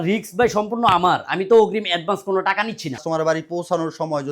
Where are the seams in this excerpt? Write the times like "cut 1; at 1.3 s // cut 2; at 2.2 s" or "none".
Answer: cut 1; at 3.0 s